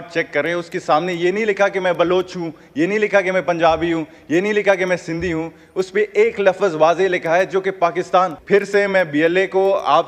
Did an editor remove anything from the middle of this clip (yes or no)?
yes